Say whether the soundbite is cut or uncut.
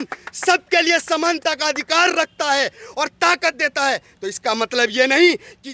uncut